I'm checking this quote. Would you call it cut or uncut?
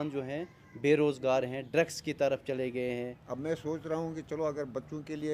cut